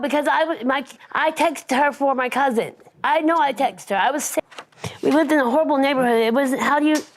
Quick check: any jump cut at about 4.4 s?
yes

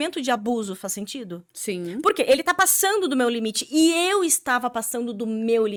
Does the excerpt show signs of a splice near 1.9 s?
no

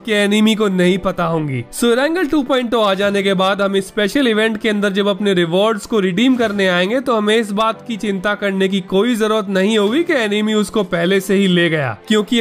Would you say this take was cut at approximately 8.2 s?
no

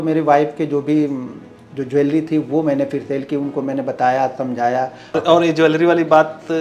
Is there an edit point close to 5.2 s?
yes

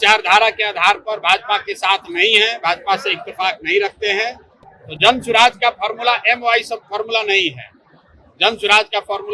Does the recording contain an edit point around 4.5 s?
no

